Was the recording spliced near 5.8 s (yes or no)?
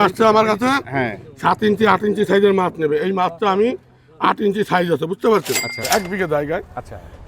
yes